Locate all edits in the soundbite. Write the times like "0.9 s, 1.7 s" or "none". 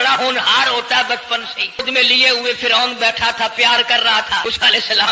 1.8 s, 4.4 s